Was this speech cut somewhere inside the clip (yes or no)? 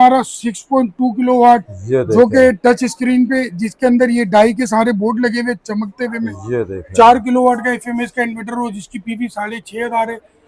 no